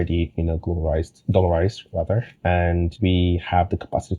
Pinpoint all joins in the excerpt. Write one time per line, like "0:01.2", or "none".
0:02.3
0:02.9